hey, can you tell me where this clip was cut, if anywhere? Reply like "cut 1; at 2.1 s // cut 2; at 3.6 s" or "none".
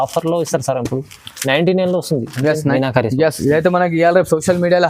cut 1; at 2.6 s